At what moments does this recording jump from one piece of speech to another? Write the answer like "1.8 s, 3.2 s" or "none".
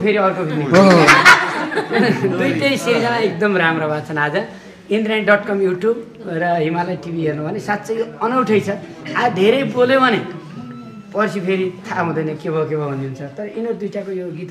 none